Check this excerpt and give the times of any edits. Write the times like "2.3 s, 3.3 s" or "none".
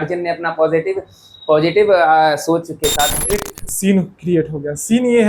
3.3 s